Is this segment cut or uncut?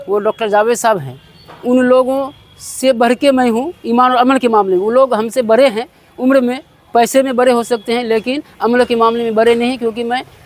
uncut